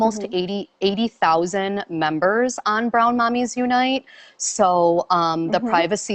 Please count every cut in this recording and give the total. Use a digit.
0